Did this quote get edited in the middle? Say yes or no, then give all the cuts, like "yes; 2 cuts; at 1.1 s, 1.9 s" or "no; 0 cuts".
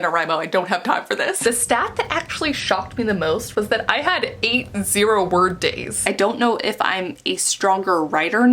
yes; 2 cuts; at 1.4 s, 6.0 s